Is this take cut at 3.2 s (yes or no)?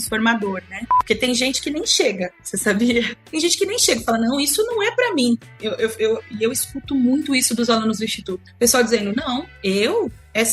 yes